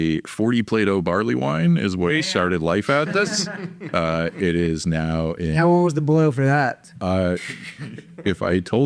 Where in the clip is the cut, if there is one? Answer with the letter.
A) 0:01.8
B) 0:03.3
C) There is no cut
C